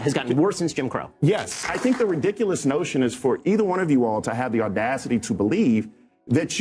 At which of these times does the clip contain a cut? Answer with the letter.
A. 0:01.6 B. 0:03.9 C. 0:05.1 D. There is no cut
A